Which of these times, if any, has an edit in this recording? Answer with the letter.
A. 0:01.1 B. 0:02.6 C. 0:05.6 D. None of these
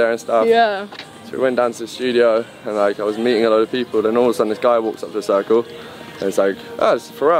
D